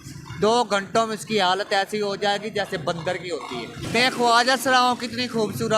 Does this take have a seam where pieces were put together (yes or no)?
yes